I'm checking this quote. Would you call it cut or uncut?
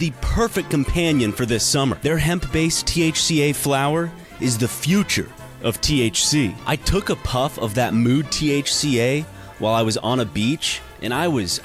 cut